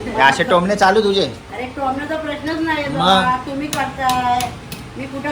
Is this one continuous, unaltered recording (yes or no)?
yes